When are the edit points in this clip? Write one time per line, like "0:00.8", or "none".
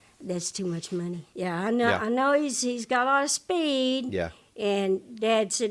0:01.2